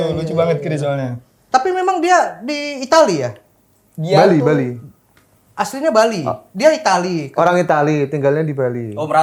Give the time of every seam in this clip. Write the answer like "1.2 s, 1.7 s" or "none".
none